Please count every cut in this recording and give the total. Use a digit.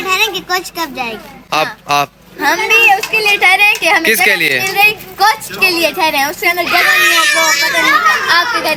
0